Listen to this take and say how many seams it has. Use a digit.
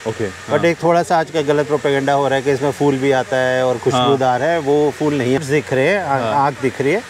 1